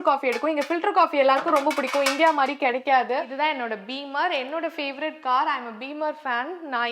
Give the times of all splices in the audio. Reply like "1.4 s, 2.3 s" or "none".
3.3 s